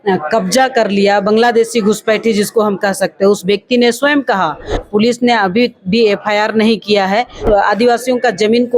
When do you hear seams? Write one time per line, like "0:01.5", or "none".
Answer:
0:04.8
0:07.5

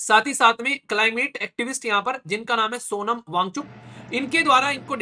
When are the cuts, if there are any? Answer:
none

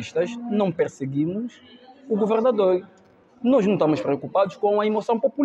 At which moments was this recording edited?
none

